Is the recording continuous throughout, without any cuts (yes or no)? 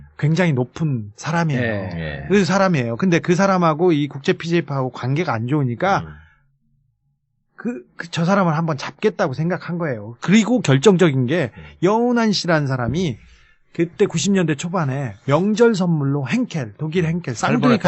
no